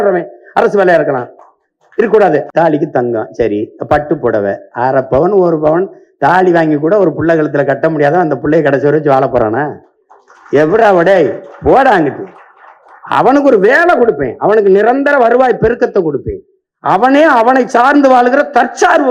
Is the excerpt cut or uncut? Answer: cut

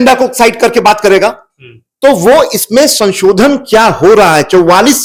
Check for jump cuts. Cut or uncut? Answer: uncut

